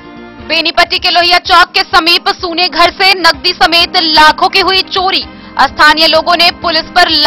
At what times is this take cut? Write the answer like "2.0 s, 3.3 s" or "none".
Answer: none